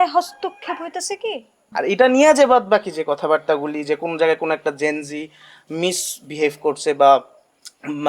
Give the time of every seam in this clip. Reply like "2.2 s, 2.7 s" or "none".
1.5 s